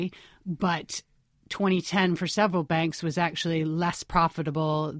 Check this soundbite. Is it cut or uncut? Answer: uncut